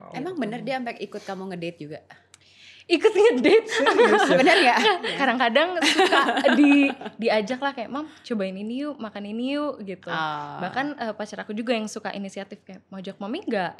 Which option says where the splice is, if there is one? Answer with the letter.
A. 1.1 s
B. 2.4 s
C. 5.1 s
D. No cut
C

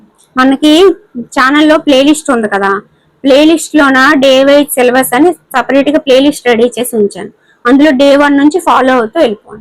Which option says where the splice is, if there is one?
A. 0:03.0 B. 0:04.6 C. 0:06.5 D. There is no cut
D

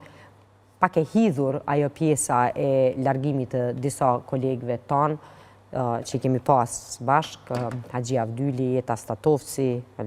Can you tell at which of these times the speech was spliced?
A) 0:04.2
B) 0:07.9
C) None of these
C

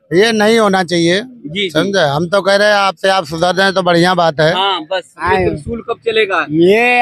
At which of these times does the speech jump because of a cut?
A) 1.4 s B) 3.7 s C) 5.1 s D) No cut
C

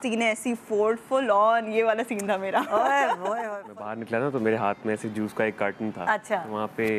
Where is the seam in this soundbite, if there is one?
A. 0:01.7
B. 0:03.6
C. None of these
B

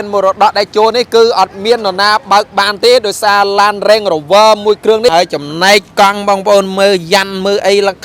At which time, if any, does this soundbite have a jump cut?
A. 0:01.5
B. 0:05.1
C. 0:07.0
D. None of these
B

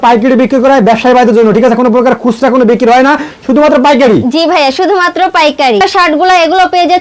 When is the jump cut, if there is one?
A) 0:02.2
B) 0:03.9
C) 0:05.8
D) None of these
C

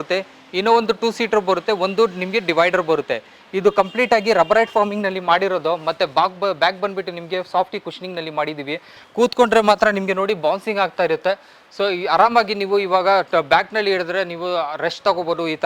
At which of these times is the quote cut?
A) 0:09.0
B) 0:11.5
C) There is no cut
A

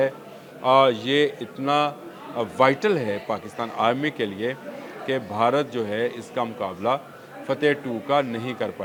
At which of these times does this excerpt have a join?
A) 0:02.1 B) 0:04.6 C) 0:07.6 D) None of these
D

